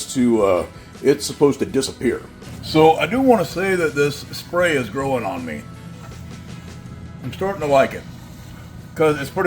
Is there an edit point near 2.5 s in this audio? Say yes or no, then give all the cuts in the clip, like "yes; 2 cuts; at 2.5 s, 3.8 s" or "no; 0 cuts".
yes; 1 cut; at 2.5 s